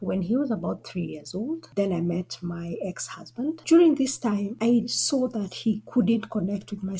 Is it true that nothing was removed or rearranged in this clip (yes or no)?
no